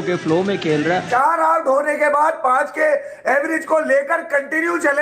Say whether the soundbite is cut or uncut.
cut